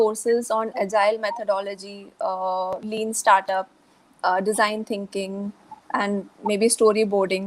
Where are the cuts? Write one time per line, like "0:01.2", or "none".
0:05.7